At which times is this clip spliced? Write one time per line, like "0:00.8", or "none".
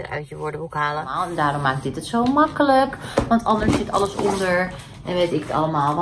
0:01.3